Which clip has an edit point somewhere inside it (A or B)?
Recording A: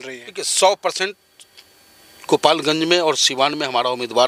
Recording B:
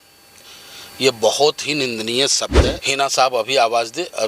B